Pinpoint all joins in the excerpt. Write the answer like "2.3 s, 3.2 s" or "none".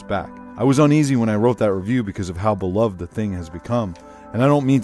3.0 s